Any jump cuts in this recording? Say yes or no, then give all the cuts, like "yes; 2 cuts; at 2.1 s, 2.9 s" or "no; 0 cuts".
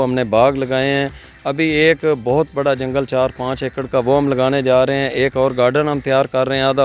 no; 0 cuts